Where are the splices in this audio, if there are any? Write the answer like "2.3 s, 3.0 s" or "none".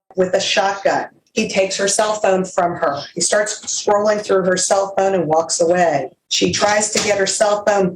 1.2 s, 6.2 s